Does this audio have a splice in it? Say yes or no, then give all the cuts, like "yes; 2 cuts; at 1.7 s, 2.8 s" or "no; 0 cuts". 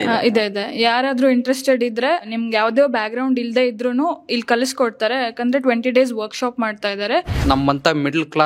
yes; 2 cuts; at 2.3 s, 7.3 s